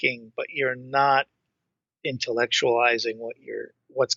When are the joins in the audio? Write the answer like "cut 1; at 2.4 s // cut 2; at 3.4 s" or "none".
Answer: none